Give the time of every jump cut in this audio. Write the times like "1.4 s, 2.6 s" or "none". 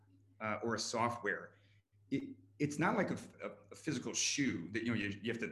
3.3 s